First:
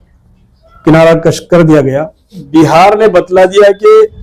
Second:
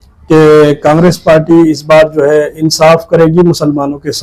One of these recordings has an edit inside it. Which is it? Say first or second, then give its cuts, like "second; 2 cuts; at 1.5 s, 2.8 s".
first; 1 cut; at 2.4 s